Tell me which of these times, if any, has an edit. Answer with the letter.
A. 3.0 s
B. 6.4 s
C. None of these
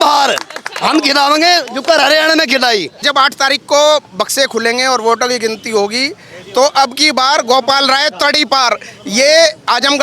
A